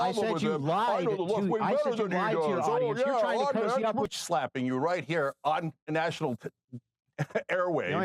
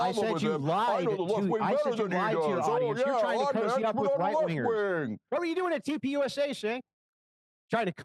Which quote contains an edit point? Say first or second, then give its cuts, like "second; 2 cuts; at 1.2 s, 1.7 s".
first; 1 cut; at 4.1 s